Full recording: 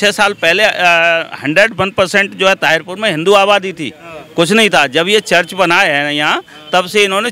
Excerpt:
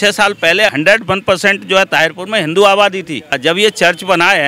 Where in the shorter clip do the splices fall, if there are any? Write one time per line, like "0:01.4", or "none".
0:00.7
0:03.4